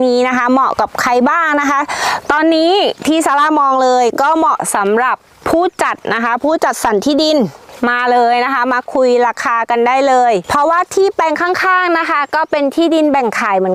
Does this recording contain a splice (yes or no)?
no